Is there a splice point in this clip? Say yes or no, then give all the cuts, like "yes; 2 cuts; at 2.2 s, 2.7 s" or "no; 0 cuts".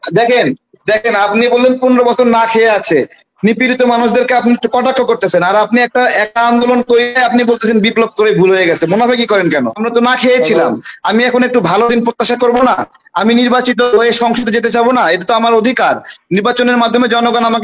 yes; 1 cut; at 9.8 s